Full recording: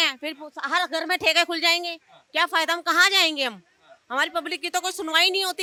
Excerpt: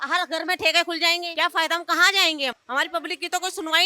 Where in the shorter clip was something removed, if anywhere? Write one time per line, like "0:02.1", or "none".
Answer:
0:01.3
0:02.6